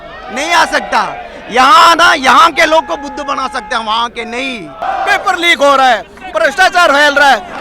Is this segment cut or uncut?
cut